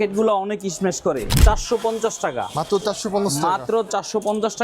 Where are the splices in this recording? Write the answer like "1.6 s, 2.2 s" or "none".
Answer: 1.3 s